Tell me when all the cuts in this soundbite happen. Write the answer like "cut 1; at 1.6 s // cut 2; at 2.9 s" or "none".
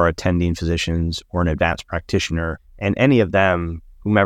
cut 1; at 2.7 s